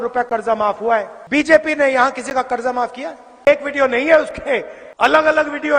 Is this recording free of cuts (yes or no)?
no